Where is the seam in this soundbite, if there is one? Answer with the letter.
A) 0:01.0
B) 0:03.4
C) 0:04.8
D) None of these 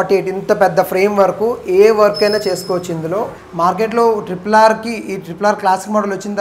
B